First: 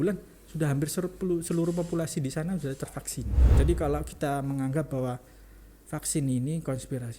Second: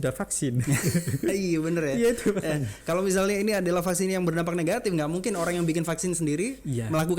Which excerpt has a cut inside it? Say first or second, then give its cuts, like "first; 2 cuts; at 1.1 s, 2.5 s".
first; 1 cut; at 3.4 s